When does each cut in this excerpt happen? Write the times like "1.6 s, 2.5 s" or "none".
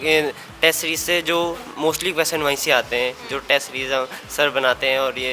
none